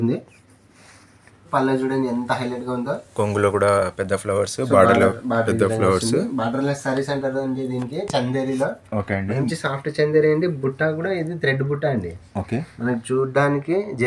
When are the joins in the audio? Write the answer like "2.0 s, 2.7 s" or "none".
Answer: 1.4 s